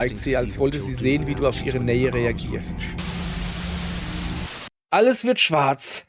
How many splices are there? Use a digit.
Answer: 1